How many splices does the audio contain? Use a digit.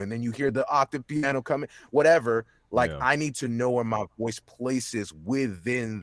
0